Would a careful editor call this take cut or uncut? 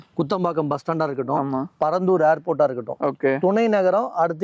uncut